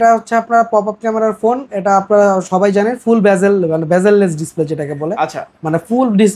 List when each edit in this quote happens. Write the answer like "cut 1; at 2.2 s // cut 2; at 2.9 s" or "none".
none